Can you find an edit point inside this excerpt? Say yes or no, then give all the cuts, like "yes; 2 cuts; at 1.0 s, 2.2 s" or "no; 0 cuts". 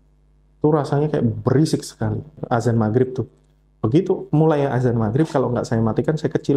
yes; 1 cut; at 2.4 s